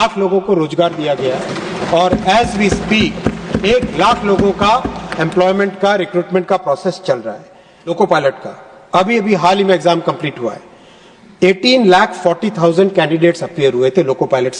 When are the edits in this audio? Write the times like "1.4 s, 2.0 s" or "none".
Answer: 7.8 s